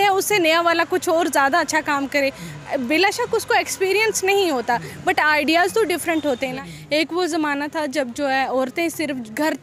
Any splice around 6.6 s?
yes; 1 cut; at 6.6 s

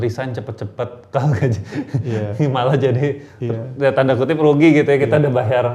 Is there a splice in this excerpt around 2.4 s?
no; 0 cuts

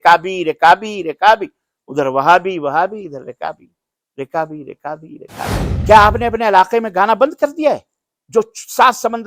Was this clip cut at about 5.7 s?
yes; 1 cut; at 5.7 s

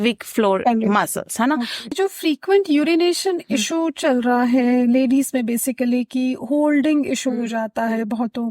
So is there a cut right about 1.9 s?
yes; 1 cut; at 1.9 s

